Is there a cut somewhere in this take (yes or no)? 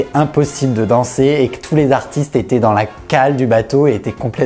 no